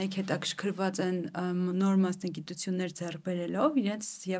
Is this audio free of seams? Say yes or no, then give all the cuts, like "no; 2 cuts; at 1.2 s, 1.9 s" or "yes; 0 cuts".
yes; 0 cuts